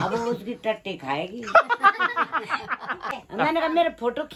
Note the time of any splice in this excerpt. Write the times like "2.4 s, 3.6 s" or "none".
3.2 s